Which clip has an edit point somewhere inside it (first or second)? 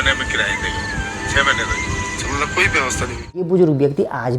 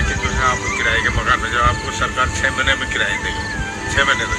first